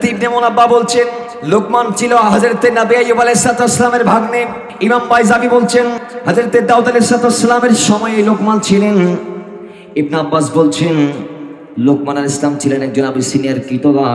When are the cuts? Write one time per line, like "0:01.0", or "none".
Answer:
0:01.3
0:04.6
0:06.1